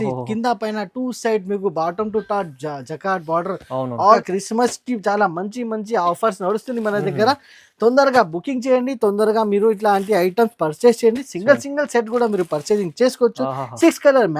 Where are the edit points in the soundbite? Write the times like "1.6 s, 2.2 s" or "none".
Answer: 4.2 s